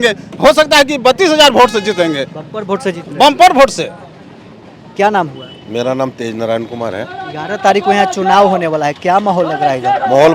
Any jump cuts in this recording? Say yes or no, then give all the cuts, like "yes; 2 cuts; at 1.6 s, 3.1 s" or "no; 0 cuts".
no; 0 cuts